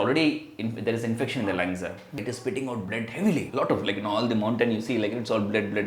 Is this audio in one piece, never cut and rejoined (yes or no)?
no